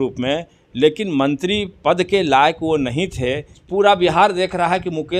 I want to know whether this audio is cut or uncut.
cut